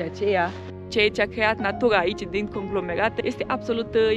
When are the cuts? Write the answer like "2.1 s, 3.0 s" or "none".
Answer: 0.9 s, 3.2 s